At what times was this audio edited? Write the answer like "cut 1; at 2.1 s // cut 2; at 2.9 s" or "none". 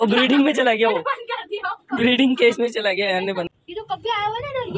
cut 1; at 3.5 s

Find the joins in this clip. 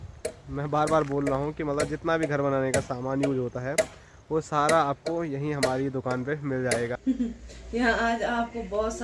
cut 1; at 7.0 s

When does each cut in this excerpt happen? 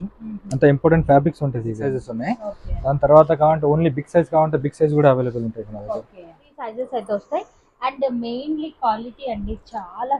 cut 1; at 1.9 s // cut 2; at 6.6 s

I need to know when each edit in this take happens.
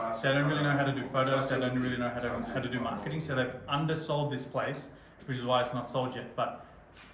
none

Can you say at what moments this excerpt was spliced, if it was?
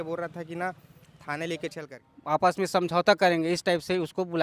cut 1; at 1.8 s

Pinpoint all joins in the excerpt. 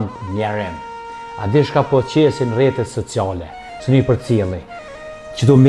none

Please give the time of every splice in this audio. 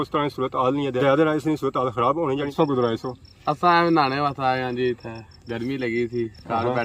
cut 1; at 2.5 s

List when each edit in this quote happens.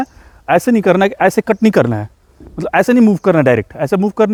none

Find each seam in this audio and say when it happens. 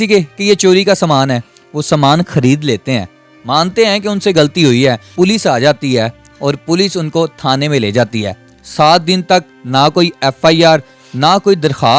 cut 1; at 5.0 s

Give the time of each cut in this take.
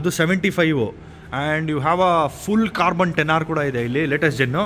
none

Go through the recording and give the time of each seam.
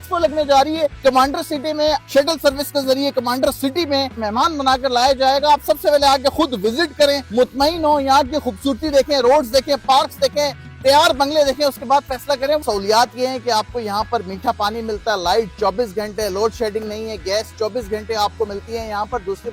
cut 1; at 1.0 s // cut 2; at 2.0 s // cut 3; at 4.2 s // cut 4; at 7.2 s // cut 5; at 12.6 s

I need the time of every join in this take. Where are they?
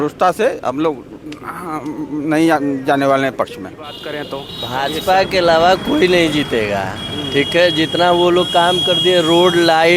cut 1; at 4.0 s

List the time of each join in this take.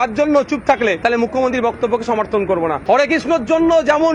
cut 1; at 1.0 s // cut 2; at 2.8 s

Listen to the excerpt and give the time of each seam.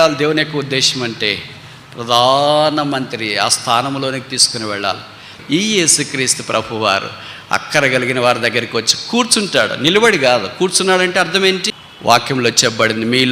cut 1; at 5.3 s // cut 2; at 11.7 s

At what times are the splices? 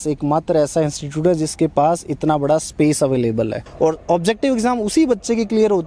cut 1; at 3.6 s

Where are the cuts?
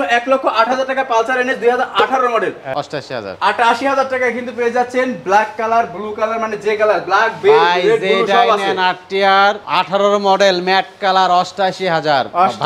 cut 1; at 2.6 s // cut 2; at 9.6 s

